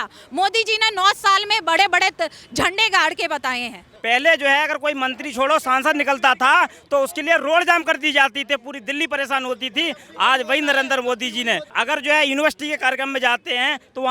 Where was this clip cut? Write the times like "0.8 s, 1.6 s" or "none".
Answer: 3.9 s, 11.7 s